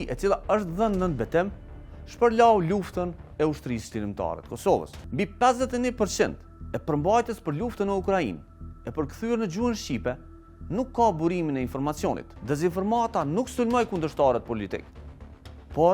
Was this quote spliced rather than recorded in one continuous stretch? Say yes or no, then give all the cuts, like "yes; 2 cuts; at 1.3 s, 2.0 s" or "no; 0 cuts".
yes; 2 cuts; at 5.0 s, 12.3 s